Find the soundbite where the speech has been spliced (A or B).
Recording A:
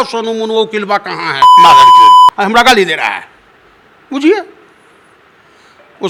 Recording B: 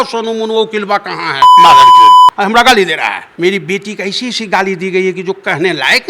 B